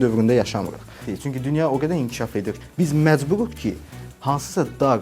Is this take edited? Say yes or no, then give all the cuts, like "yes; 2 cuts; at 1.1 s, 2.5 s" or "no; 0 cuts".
yes; 1 cut; at 1.1 s